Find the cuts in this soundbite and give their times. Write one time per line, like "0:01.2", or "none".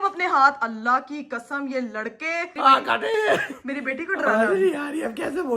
0:02.5